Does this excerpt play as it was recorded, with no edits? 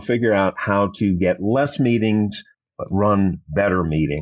yes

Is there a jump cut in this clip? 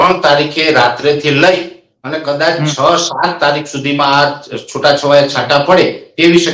no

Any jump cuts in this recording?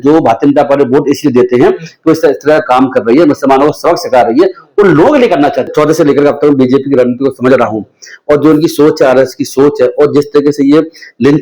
yes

